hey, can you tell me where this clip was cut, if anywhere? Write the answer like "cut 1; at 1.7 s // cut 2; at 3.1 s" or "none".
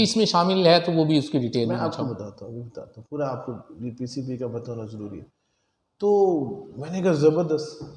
none